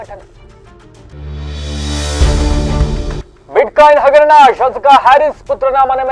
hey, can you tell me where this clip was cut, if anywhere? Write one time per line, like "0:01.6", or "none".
none